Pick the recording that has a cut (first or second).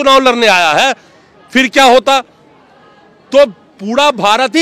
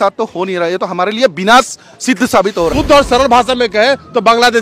second